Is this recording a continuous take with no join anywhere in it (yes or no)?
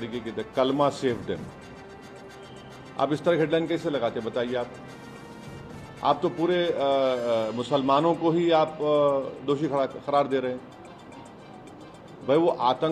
yes